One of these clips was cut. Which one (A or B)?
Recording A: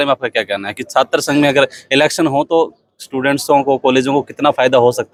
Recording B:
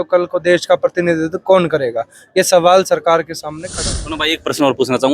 B